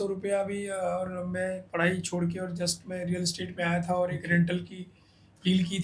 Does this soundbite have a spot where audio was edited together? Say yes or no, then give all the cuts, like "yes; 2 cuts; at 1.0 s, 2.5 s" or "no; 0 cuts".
no; 0 cuts